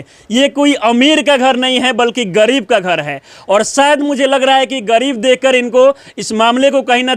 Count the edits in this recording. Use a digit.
0